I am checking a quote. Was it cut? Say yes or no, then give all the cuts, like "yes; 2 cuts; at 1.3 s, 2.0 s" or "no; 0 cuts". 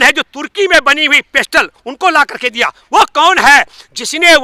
no; 0 cuts